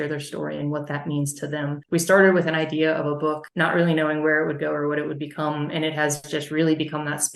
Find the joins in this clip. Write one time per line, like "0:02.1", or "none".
0:01.8